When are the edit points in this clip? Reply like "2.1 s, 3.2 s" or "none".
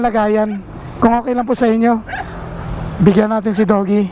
none